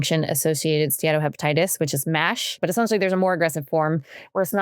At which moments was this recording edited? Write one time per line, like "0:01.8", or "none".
0:02.6